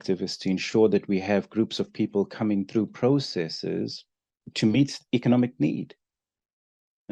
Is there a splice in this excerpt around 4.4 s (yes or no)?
yes